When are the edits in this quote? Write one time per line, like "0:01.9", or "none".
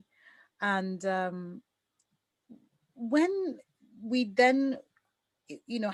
none